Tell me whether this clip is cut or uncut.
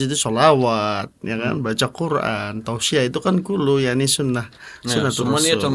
uncut